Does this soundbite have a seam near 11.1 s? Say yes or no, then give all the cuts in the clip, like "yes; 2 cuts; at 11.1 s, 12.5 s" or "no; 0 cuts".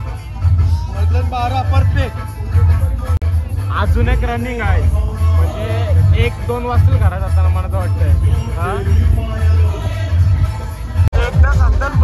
yes; 1 cut; at 11.1 s